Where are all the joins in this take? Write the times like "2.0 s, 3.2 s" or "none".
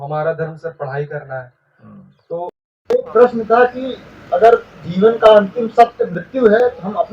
2.4 s